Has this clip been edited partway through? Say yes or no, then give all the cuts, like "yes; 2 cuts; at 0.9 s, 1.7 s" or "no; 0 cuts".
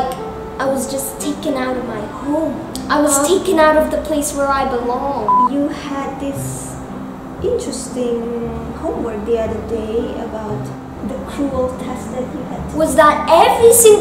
yes; 2 cuts; at 5.3 s, 12.6 s